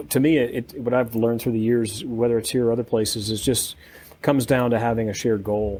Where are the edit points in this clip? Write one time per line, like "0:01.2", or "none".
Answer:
none